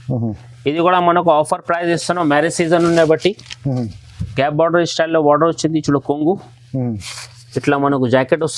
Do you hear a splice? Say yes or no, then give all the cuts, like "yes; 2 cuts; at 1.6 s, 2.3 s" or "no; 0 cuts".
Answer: no; 0 cuts